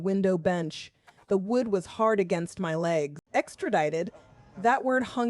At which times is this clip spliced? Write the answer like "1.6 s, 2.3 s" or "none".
3.2 s